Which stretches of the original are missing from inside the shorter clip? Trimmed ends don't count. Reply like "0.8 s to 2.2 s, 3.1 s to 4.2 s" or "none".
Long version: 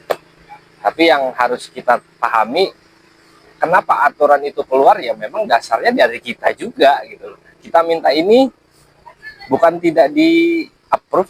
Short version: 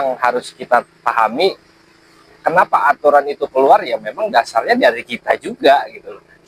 none